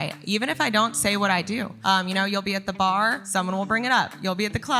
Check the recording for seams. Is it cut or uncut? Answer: cut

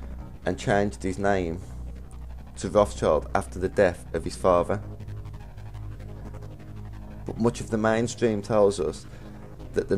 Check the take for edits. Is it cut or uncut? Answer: uncut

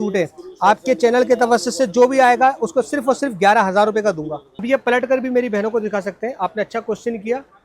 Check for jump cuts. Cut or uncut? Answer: cut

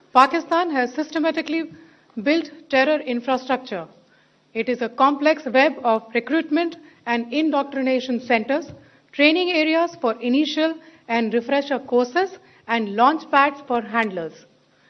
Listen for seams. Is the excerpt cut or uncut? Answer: uncut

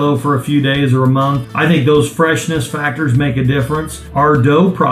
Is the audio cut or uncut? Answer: cut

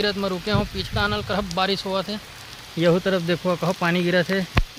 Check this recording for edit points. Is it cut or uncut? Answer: uncut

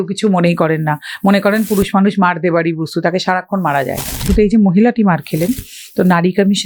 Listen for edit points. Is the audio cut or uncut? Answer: cut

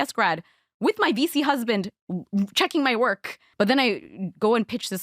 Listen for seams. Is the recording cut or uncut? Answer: cut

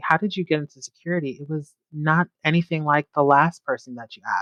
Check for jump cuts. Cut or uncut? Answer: uncut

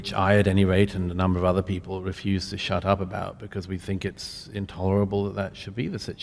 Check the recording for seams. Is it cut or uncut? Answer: uncut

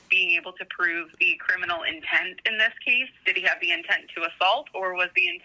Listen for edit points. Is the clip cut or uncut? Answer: cut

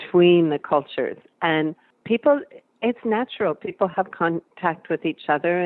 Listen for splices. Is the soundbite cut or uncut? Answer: cut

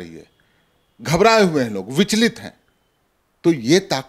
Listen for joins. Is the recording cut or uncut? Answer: uncut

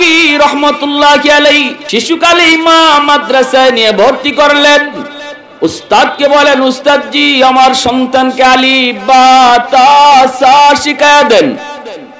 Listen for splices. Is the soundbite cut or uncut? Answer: cut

